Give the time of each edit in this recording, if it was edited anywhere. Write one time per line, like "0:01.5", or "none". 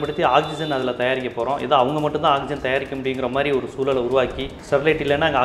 0:04.5